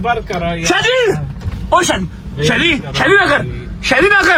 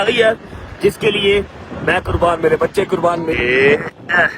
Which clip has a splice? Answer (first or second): second